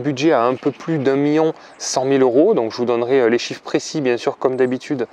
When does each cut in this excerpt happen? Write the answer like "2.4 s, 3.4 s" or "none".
none